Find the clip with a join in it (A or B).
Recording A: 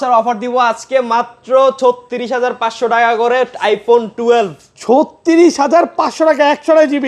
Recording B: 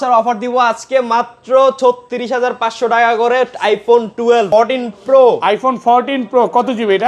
B